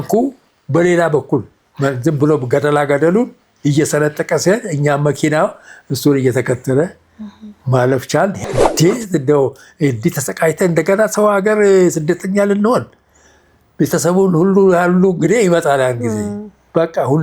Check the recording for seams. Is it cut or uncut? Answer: cut